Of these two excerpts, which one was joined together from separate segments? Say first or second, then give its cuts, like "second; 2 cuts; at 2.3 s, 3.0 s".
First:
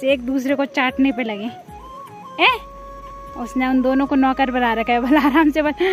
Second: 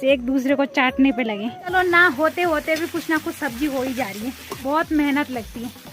second; 2 cuts; at 1.7 s, 4.5 s